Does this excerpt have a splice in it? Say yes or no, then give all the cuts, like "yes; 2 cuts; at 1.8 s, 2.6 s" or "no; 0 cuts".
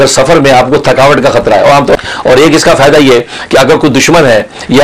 yes; 1 cut; at 2.0 s